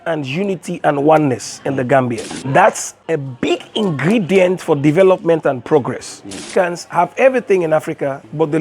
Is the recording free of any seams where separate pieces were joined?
no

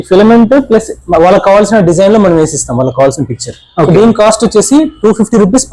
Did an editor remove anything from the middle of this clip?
no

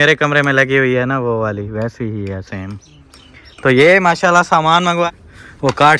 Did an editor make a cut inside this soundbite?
yes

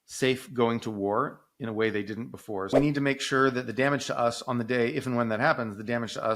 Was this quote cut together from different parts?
yes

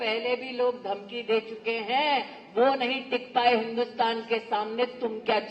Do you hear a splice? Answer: no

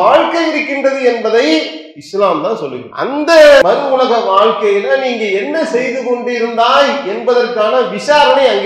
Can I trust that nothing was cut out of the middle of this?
no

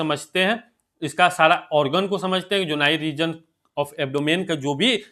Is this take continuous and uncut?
yes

